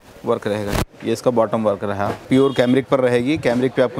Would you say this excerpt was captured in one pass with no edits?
no; 1 cut; at 2.3 s

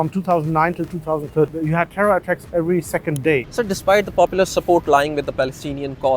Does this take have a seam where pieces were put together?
yes; 2 cuts; at 1.5 s, 3.5 s

